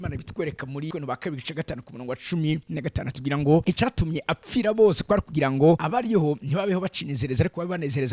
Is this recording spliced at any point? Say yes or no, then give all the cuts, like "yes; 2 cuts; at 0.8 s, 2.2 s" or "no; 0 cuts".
yes; 3 cuts; at 0.9 s, 3.6 s, 5.8 s